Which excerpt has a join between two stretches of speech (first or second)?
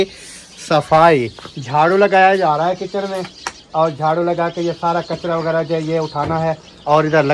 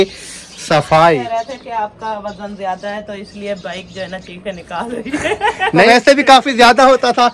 second